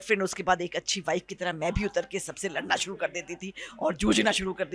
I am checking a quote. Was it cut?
no; 0 cuts

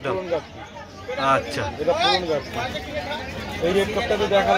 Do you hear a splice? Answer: no; 0 cuts

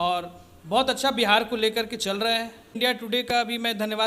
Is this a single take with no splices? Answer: no; 1 cut; at 2.8 s

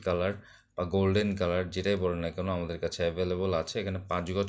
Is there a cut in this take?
no; 0 cuts

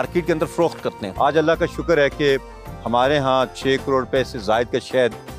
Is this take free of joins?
no; 1 cut; at 1.0 s

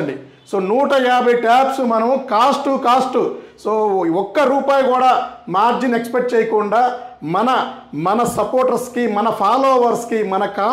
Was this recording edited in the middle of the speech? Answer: no; 0 cuts

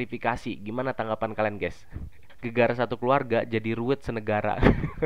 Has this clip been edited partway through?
yes; 1 cut; at 2.3 s

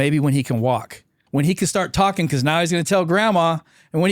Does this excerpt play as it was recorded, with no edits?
no; 1 cut; at 1.1 s

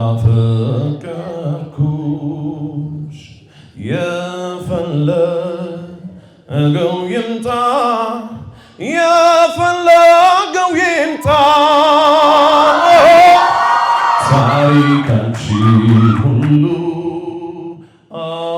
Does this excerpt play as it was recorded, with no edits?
yes; 0 cuts

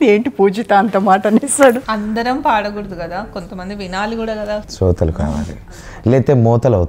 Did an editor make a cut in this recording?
yes; 2 cuts; at 1.8 s, 4.7 s

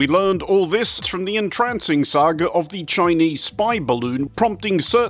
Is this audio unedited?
no; 2 cuts; at 1.0 s, 4.2 s

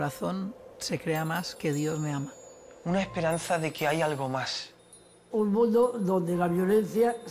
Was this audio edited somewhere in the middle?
yes; 1 cut; at 3.8 s

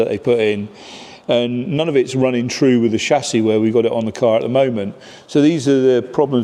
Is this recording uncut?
yes; 0 cuts

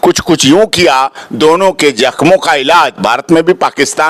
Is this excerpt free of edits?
yes; 0 cuts

